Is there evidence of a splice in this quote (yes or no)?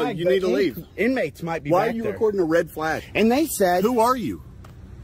yes